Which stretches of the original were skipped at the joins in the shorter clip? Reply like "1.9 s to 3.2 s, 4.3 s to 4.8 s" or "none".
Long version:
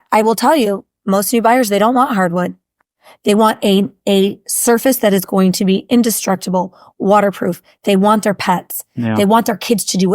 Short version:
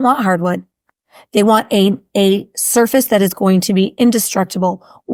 none